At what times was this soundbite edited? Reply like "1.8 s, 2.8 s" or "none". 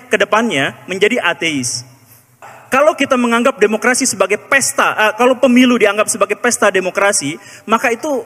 2.5 s